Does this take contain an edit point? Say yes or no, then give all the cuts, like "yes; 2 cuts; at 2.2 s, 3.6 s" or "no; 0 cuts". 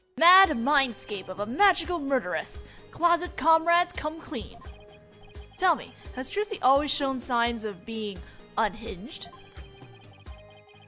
yes; 1 cut; at 8.9 s